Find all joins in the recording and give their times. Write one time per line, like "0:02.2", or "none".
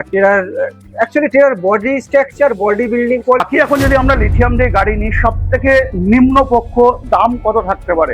0:03.4